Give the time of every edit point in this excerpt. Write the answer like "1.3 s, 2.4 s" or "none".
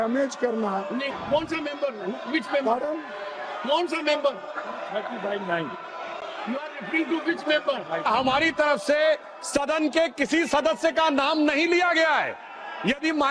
1.1 s, 8.1 s

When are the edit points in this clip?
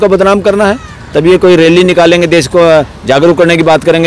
none

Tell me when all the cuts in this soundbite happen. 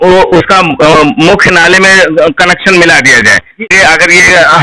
3.7 s

